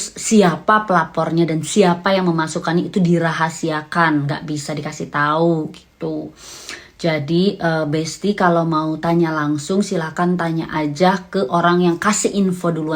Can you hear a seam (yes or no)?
no